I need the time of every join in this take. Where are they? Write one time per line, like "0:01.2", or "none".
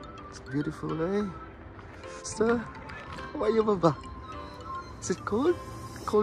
0:02.3

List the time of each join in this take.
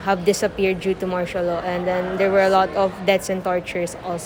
none

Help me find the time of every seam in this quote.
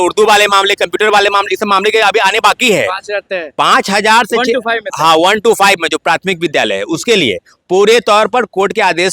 none

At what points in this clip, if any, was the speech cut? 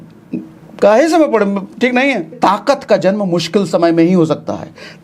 0:02.3

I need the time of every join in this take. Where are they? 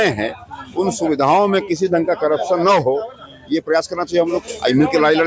none

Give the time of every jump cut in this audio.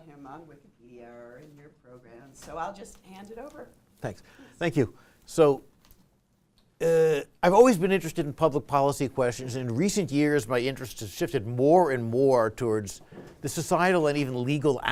none

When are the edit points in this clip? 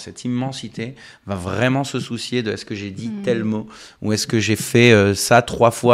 none

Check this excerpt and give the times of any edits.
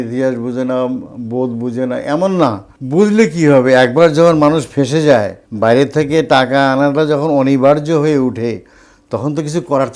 0:02.7
0:05.4

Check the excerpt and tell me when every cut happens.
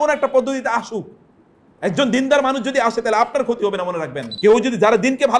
0:04.2

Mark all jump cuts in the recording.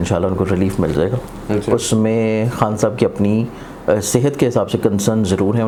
none

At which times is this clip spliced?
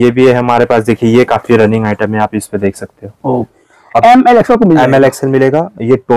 0:03.6

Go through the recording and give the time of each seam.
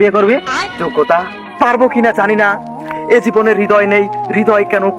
0:01.4

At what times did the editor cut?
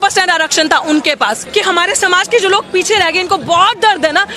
0:01.4

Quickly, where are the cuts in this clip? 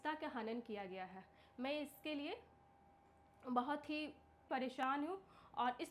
0:04.5

